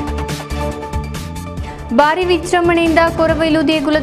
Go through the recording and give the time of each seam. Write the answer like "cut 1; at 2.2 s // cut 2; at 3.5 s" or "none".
cut 1; at 1.2 s